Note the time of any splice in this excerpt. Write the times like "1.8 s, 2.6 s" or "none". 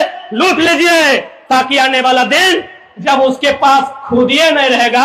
none

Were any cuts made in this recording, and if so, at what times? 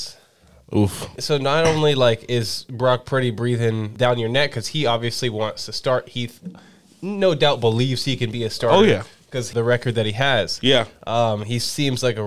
1.2 s, 3.9 s, 9.5 s

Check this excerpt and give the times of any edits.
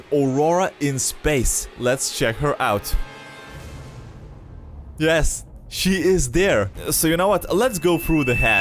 6.7 s

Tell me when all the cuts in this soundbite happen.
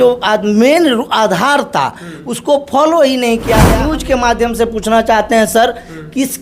3.9 s

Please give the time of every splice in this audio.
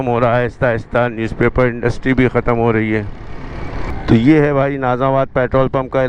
3.9 s

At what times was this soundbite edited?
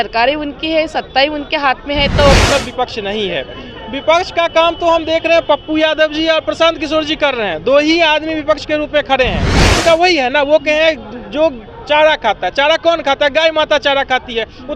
2.3 s, 9.7 s

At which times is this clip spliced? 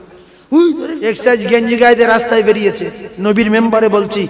0.9 s

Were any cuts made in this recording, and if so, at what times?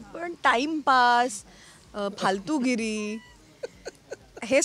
none

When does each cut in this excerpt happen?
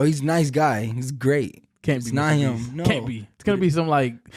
none

